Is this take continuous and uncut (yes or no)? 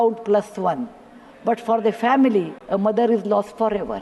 no